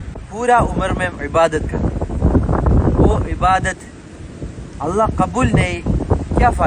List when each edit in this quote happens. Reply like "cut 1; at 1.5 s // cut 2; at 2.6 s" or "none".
none